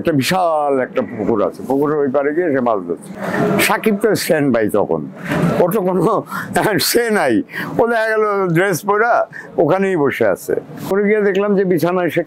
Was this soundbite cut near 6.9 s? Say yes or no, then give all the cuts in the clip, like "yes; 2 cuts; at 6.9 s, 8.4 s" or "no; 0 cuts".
no; 2 cuts; at 3.1 s, 10.9 s